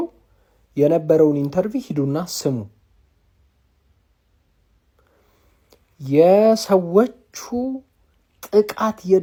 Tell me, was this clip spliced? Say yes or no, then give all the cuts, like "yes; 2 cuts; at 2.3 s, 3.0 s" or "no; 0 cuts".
no; 0 cuts